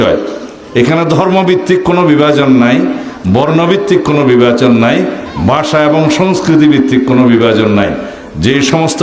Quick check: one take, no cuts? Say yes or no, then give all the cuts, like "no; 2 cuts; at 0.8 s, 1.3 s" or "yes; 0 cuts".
yes; 0 cuts